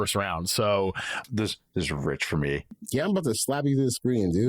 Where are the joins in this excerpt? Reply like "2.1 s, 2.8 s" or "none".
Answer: 1.2 s, 2.7 s